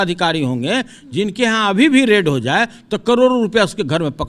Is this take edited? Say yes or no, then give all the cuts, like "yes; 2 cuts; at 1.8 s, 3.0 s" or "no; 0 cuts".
no; 0 cuts